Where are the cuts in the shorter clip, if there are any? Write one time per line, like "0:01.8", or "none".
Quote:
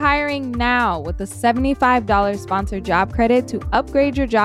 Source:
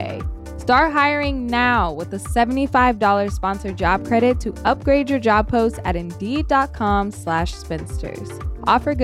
none